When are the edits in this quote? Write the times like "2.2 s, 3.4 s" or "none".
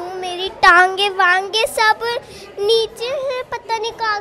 none